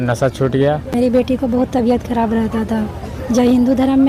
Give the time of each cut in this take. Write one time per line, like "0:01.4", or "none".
0:00.9